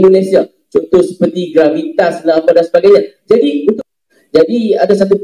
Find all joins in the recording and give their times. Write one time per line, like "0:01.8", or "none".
0:03.8